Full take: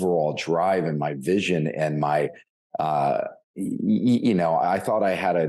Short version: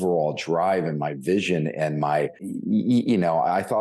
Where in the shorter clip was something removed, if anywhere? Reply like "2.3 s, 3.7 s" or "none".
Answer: 2.5 s